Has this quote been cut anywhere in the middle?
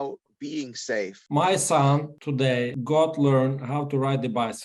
yes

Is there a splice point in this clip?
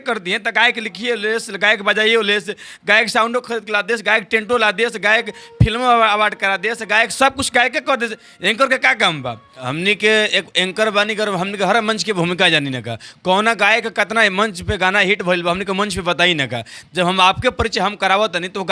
yes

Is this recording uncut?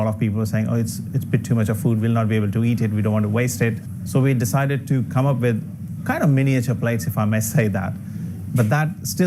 no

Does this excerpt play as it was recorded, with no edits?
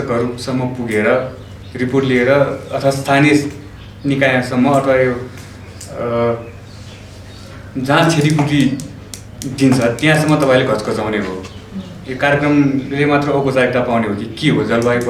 yes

